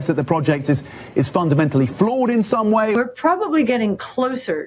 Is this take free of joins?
no; 1 cut; at 3.0 s

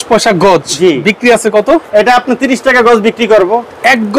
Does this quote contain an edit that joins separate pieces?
no; 0 cuts

